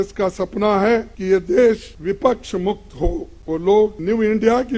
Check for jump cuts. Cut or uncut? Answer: cut